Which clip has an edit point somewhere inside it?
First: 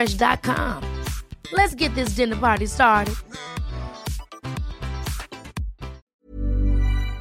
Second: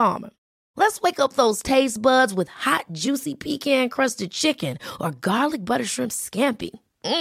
first; 1 cut; at 6.0 s

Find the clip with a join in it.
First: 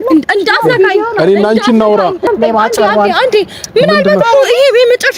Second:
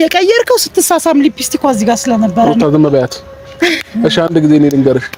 first; 1 cut; at 2.3 s

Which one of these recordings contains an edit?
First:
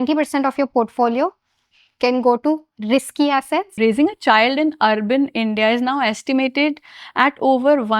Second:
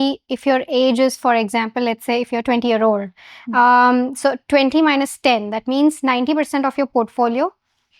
first; 1 cut; at 3.7 s

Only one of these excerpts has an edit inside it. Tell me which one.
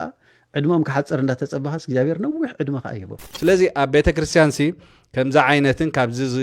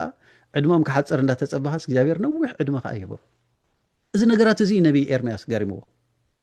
first; 1 cut; at 3.2 s

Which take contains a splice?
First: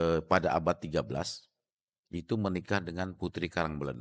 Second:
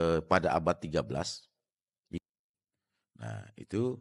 second; 1 cut; at 2.2 s

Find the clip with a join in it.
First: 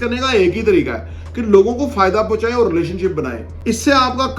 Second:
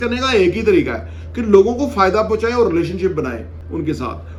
first; 1 cut; at 3.4 s

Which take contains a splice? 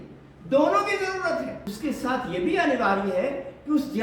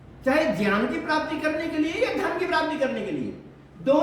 first; 1 cut; at 1.6 s

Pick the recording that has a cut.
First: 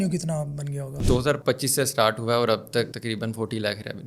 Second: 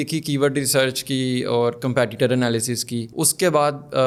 first; 1 cut; at 1.0 s

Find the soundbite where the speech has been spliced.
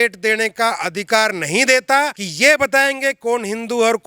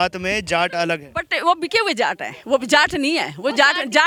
first; 1 cut; at 2.2 s

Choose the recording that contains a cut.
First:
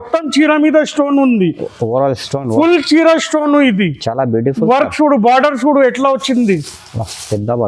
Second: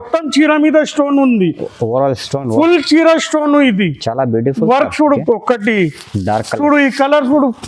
second; 1 cut; at 5.2 s

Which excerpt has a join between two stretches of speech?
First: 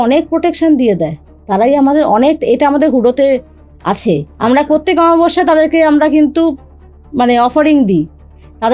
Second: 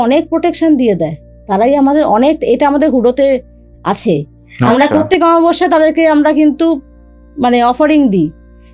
first; 1 cut; at 4.4 s

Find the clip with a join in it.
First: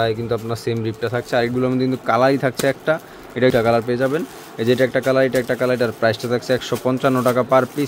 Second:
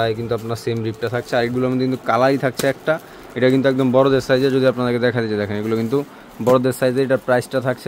first; 1 cut; at 3.5 s

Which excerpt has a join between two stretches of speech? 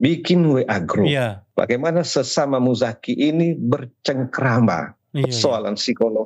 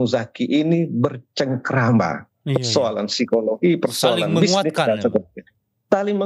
first; 1 cut; at 1.4 s

